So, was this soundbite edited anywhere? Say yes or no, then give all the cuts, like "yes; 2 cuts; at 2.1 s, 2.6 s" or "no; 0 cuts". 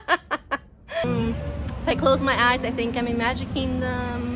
yes; 1 cut; at 1.0 s